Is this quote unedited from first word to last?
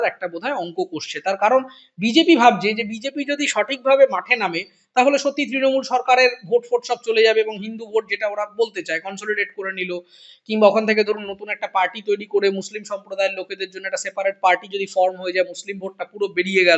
yes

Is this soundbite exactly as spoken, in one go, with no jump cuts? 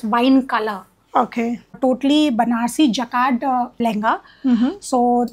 no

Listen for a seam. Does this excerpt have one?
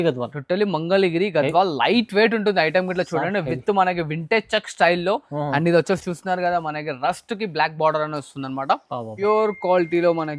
yes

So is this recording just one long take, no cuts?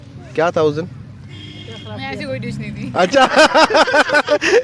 yes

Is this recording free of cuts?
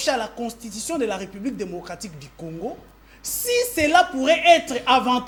yes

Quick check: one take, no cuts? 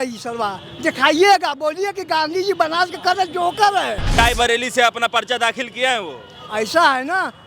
no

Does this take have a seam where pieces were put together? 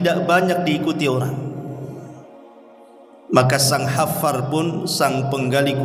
no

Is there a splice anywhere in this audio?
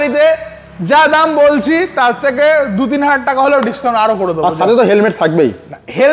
no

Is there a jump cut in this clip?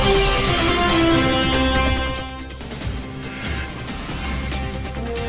no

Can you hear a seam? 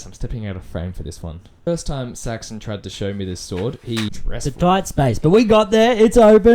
yes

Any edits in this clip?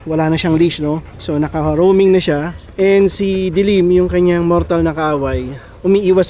yes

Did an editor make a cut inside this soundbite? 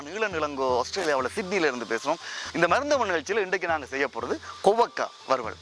yes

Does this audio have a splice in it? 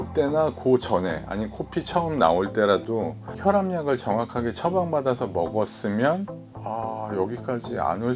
yes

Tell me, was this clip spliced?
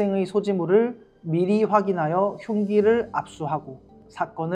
no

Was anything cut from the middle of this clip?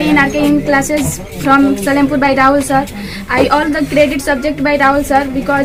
no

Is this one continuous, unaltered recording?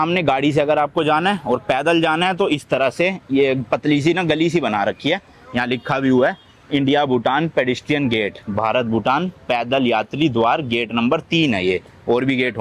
yes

